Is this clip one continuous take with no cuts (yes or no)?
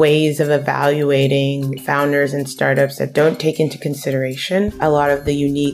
no